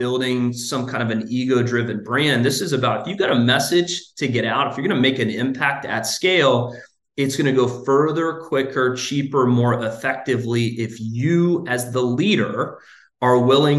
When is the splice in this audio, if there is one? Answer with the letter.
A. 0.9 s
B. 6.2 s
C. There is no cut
C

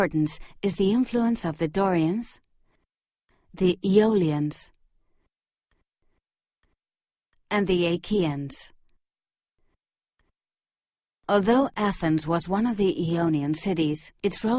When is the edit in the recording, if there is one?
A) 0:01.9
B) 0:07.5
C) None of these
A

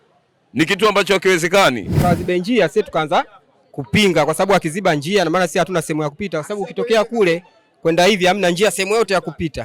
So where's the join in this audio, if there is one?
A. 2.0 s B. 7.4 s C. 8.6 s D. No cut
A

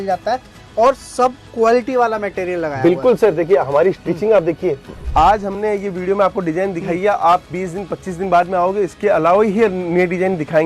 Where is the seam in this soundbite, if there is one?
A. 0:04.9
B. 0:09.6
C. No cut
A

